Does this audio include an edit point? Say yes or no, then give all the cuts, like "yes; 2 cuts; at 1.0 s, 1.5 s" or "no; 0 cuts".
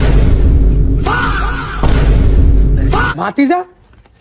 yes; 1 cut; at 3.1 s